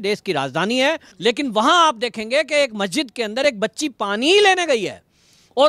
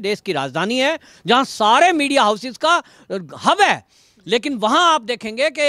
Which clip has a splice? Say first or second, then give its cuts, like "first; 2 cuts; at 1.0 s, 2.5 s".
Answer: first; 1 cut; at 1.1 s